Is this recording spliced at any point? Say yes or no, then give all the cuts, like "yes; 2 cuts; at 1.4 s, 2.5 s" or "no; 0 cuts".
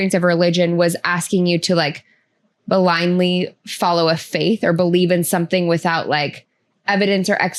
no; 0 cuts